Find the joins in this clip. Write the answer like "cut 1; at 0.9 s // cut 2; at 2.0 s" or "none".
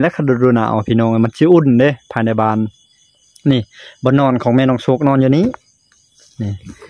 none